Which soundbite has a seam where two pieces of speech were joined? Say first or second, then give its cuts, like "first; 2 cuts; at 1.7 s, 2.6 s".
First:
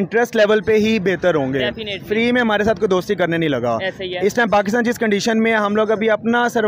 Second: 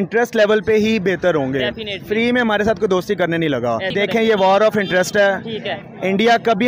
second; 1 cut; at 3.9 s